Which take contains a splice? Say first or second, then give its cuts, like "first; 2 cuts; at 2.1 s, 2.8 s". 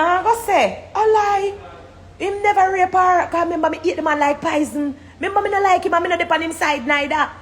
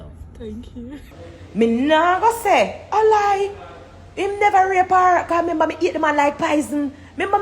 second; 1 cut; at 1.1 s